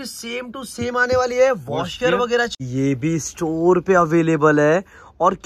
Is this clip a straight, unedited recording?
no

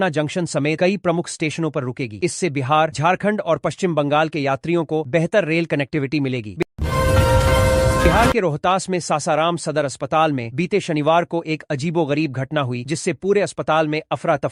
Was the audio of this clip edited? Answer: yes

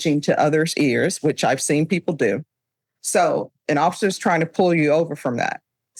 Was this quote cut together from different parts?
no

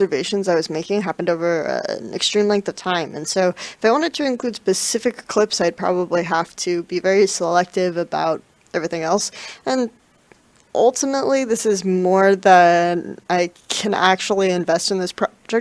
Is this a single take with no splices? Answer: yes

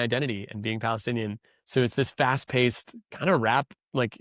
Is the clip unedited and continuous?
yes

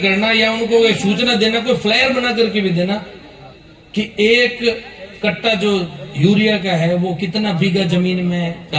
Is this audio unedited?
yes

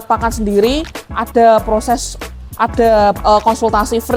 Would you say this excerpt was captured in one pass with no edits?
yes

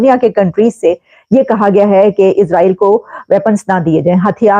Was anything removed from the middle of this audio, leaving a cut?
no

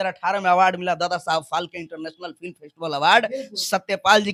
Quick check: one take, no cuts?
yes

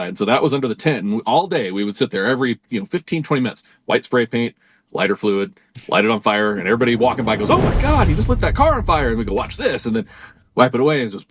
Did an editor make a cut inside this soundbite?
no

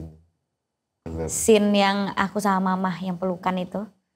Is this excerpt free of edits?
no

